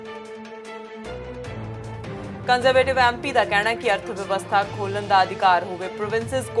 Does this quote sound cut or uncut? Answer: cut